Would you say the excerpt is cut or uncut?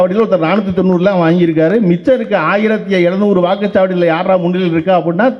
uncut